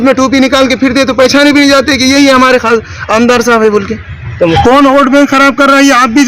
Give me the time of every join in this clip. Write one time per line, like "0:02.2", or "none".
0:04.6